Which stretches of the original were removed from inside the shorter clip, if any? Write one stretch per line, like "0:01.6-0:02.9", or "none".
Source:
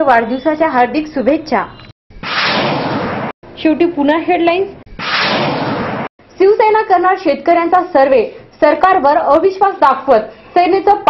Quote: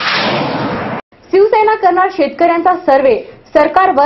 0:03.4-0:06.1